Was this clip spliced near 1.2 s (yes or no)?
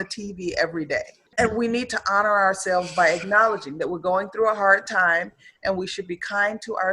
yes